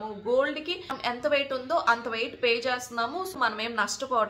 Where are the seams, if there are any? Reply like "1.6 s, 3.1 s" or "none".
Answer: 1.0 s, 3.3 s